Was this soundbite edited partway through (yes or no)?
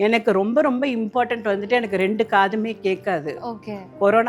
no